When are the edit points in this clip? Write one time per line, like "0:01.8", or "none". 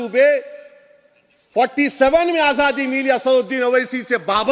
none